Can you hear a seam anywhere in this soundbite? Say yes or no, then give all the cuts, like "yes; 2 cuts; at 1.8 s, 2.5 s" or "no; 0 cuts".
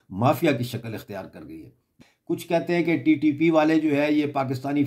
yes; 1 cut; at 1.9 s